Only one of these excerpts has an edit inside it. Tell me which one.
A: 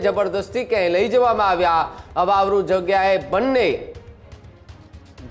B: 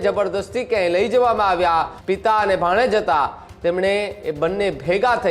B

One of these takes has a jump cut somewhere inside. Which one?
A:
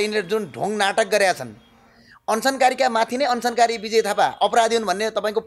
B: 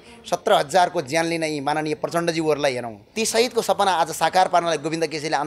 B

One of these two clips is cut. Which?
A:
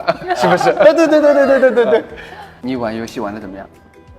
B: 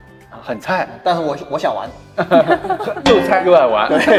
A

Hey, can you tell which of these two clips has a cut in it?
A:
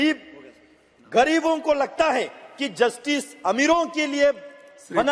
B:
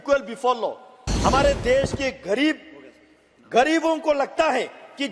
B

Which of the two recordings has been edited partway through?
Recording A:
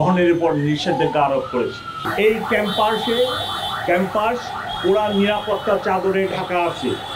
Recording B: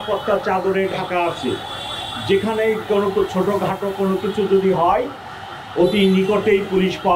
A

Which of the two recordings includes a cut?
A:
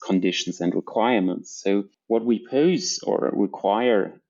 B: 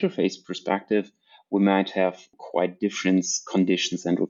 A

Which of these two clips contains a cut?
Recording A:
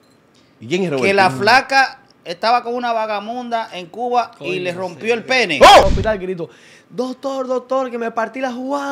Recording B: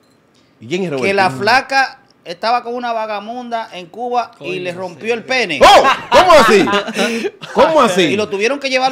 A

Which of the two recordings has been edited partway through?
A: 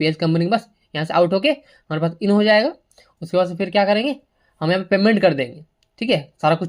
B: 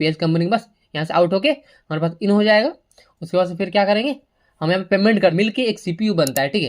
B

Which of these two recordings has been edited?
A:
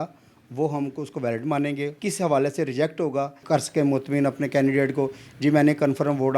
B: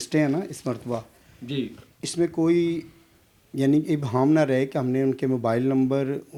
A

